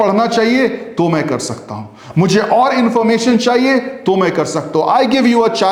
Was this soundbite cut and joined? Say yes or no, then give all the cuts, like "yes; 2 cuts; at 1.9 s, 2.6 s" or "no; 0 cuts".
no; 0 cuts